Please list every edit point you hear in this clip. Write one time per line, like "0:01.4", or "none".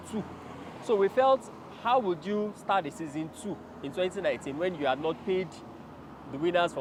none